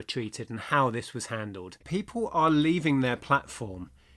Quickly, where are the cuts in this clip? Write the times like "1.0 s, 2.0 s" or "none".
1.8 s